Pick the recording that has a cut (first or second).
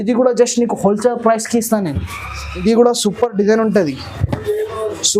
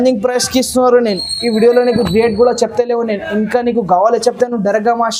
first